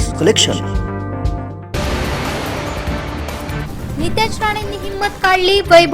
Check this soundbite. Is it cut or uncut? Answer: cut